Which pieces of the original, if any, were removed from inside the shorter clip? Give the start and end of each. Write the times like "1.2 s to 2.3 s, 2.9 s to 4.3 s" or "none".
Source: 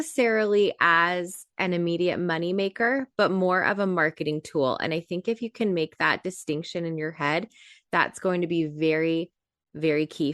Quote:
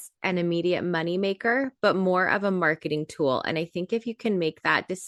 none